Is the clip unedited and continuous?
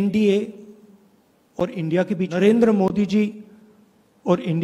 no; 1 cut; at 2.4 s

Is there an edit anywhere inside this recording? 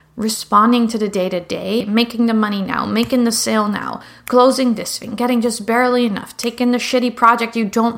yes; 1 cut; at 1.8 s

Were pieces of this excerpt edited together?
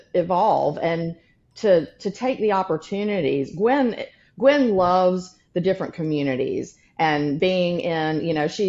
no; 0 cuts

